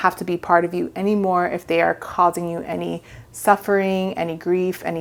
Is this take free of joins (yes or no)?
yes